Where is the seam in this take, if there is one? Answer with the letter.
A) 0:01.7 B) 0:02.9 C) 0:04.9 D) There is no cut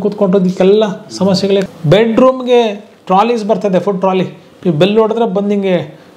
A